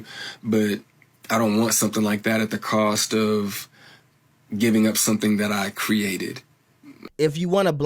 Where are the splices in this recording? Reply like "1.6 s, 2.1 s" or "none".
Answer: 6.9 s